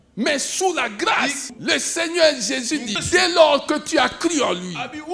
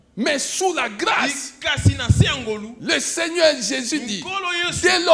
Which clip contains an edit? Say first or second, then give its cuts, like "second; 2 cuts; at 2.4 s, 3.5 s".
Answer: first; 2 cuts; at 1.5 s, 3.0 s